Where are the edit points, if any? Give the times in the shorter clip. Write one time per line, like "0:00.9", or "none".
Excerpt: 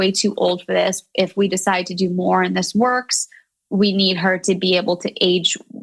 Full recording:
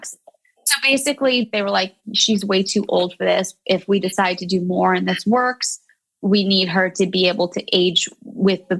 none